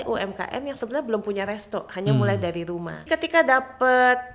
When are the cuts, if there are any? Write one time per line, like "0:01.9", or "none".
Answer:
0:03.0